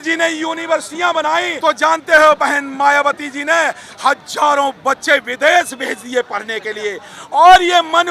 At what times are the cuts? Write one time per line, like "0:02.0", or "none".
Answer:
0:01.5